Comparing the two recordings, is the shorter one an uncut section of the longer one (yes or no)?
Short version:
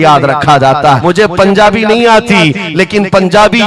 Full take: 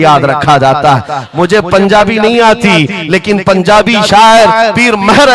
no